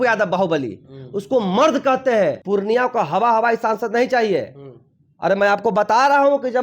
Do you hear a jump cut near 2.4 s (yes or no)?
yes